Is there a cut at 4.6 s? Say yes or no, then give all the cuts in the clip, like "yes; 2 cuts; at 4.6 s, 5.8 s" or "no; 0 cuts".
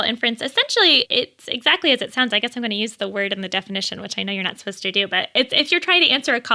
no; 0 cuts